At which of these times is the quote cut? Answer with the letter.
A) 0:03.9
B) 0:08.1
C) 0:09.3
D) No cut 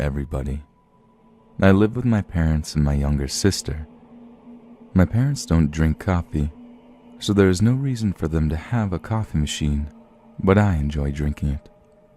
B